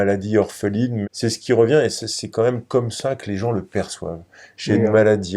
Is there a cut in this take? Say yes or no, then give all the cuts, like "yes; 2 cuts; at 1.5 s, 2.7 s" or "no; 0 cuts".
yes; 1 cut; at 1.0 s